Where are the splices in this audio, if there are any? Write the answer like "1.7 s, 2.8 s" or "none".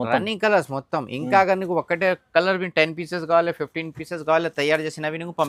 none